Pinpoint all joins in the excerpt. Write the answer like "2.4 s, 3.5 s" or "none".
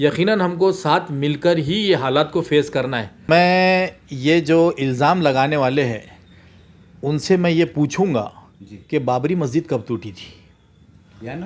3.2 s